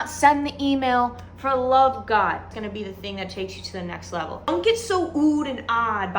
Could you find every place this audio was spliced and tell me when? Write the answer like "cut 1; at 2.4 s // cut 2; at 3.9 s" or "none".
cut 1; at 2.5 s // cut 2; at 4.4 s